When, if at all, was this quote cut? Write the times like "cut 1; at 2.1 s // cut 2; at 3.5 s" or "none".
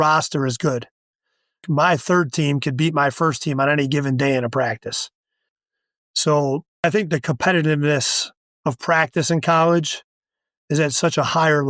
cut 1; at 1.6 s // cut 2; at 6.8 s